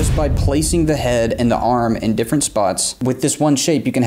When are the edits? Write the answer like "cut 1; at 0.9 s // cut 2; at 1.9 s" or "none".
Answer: cut 1; at 2.9 s